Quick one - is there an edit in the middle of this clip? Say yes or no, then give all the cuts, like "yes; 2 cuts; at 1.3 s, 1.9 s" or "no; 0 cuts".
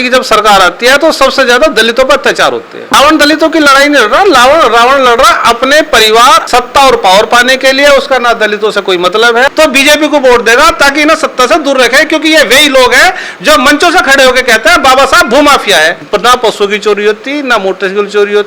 yes; 4 cuts; at 2.8 s, 6.4 s, 9.5 s, 16.0 s